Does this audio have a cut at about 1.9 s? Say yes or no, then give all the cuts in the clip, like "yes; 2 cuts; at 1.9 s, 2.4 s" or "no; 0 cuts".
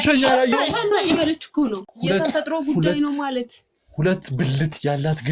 yes; 1 cut; at 1.9 s